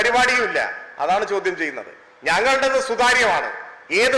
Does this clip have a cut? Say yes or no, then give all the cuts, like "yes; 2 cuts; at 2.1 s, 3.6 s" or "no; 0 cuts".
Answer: no; 0 cuts